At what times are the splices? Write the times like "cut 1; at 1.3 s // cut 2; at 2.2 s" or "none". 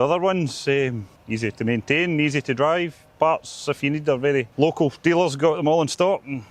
cut 1; at 1.1 s // cut 2; at 4.5 s